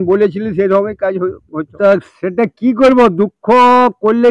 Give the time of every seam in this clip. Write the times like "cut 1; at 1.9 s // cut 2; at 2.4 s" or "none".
cut 1; at 1.6 s

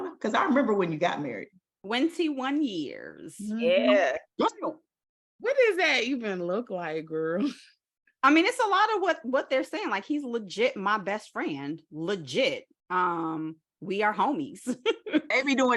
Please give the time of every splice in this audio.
none

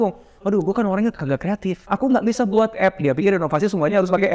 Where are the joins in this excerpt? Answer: cut 1; at 1.8 s

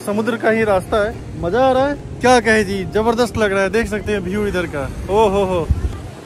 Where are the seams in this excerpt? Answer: none

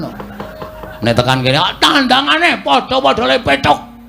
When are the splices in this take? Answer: none

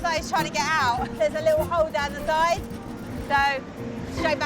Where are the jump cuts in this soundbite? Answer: cut 1; at 1.1 s

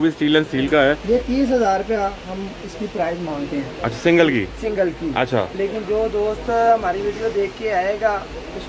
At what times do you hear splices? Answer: cut 1; at 1.0 s

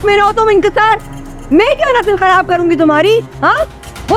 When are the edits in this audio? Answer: none

